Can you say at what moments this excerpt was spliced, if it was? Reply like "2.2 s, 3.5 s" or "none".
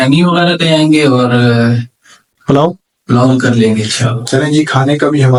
none